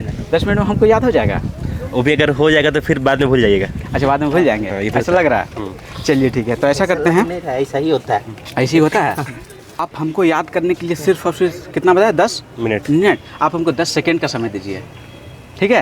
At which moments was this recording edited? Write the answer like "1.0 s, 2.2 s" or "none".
9.9 s